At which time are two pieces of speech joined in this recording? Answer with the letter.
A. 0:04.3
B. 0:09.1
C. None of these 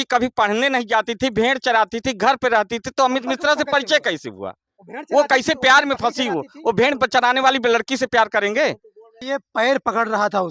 B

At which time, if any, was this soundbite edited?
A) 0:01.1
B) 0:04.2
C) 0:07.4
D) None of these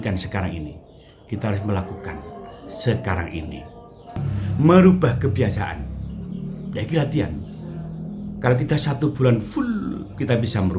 B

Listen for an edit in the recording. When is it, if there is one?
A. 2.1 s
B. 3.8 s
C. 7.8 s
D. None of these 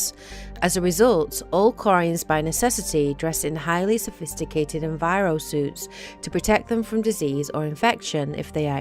D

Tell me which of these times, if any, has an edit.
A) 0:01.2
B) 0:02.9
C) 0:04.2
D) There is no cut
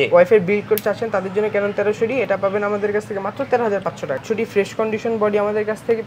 C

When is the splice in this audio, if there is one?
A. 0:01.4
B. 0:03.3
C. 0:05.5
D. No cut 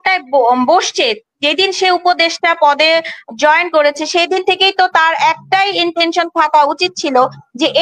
D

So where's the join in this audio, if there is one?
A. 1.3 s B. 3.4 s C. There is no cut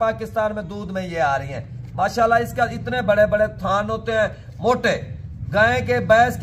C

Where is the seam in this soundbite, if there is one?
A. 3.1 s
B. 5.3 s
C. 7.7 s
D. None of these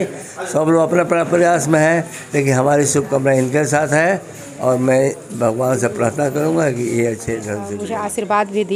C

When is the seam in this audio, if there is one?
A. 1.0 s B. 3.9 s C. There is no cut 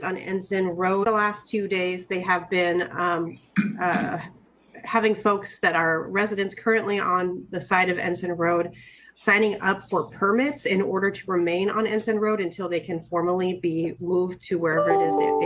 A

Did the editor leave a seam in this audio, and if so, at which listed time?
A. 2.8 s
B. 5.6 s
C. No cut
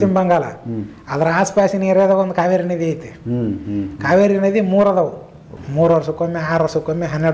B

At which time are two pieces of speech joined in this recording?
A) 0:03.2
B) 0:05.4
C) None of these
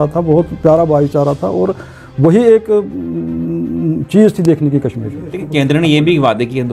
B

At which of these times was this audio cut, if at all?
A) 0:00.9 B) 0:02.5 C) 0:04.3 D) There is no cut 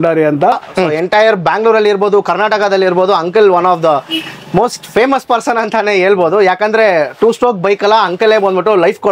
A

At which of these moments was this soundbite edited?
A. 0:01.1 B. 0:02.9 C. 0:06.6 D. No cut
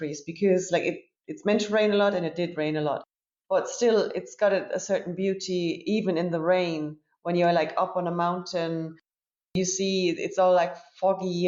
D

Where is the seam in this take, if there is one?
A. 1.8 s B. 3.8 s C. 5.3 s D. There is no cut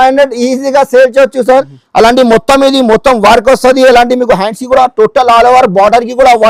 A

